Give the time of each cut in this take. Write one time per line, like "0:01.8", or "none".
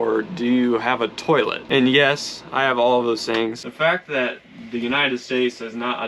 0:03.6